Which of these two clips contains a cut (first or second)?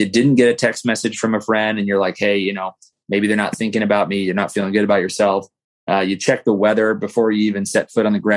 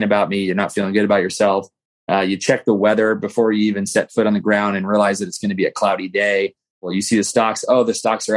second